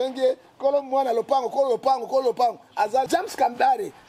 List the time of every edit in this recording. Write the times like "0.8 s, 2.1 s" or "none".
3.1 s